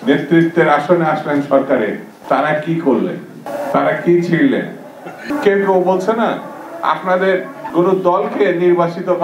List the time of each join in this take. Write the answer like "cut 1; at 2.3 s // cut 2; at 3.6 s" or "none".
cut 1; at 2.1 s // cut 2; at 3.4 s // cut 3; at 5.3 s // cut 4; at 7.6 s